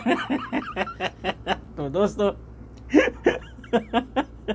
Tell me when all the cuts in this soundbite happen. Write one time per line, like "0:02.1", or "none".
none